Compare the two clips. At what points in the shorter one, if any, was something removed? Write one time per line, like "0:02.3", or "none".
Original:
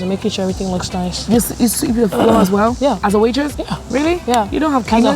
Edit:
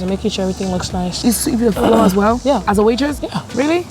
0:01.2

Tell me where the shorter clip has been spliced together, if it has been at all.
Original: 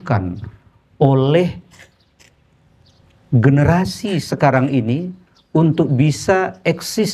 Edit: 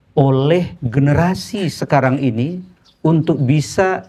0:01.0

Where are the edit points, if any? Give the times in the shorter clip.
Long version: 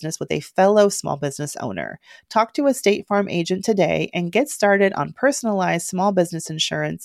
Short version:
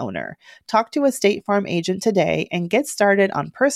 none

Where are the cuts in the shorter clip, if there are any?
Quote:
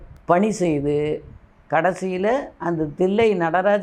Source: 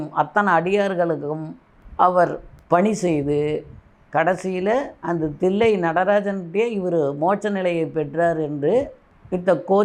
none

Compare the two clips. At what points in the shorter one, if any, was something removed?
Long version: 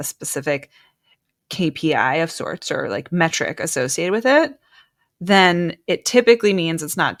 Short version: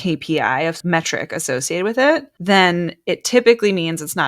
0:00.8
0:02.3

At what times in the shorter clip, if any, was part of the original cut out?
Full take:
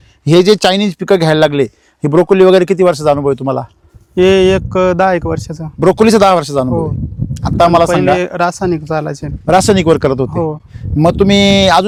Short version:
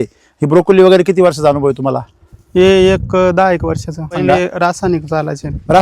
0:04.1

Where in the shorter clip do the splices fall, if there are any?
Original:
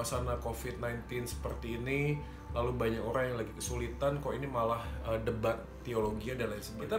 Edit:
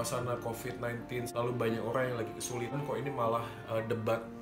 0:01.3
0:02.8

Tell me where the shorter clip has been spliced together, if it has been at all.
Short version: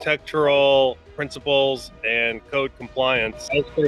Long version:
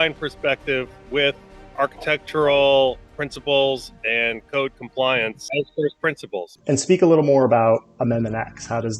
none

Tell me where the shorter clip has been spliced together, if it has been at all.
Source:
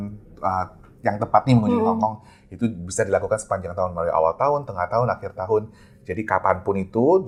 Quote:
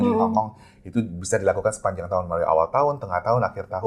none

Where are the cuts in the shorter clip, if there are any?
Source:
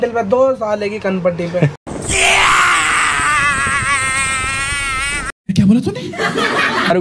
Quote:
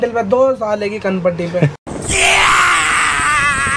none

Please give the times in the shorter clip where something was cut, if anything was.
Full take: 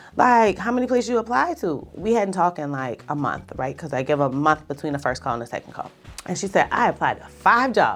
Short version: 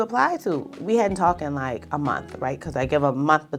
none

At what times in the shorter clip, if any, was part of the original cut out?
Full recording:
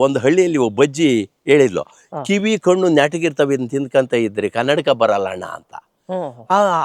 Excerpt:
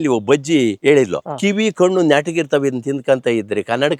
0:01.0

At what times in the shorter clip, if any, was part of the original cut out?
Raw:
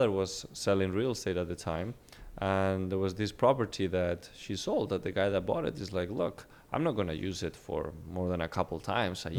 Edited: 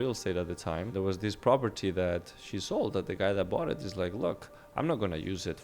0:00.9

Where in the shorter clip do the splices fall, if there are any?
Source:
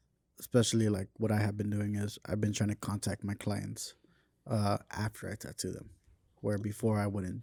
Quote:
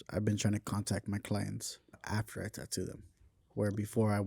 0:02.0

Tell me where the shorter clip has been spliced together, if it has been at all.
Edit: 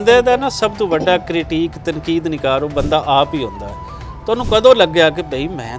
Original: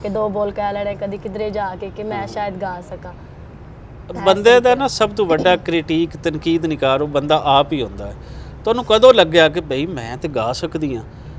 none

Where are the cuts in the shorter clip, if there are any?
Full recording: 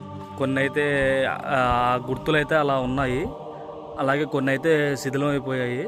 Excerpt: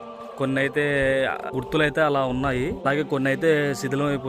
0:01.5
0:02.8

